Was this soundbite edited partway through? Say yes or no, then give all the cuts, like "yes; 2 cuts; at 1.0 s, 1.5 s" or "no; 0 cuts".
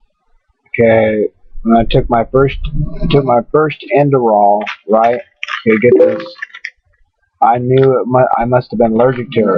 yes; 1 cut; at 8.1 s